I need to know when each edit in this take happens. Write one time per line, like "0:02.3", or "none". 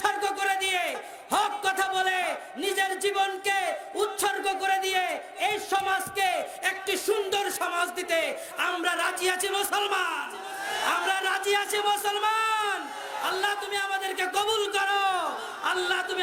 none

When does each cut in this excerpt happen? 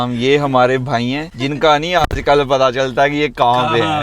0:01.3

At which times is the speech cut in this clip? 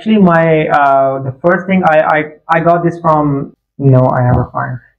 0:03.5

